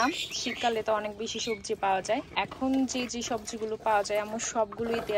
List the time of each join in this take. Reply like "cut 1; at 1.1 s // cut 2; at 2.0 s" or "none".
cut 1; at 2.3 s